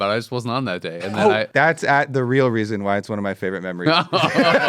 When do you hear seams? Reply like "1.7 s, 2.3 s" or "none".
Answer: 1.5 s

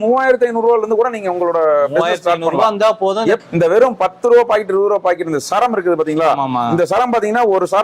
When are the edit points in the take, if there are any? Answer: 3.4 s

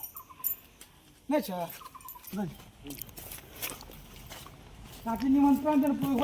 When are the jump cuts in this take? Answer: 2.2 s

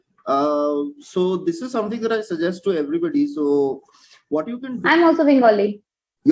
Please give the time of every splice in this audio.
4.8 s

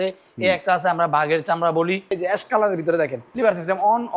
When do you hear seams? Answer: 2.1 s, 3.2 s

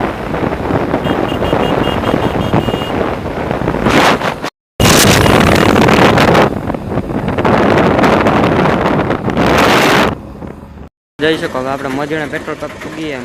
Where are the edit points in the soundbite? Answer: none

